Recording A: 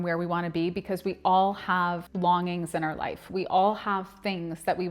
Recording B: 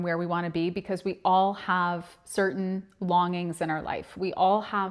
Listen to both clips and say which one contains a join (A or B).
A